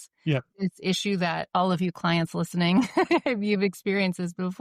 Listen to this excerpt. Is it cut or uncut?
cut